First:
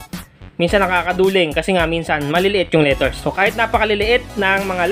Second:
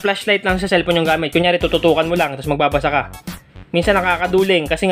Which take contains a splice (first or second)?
first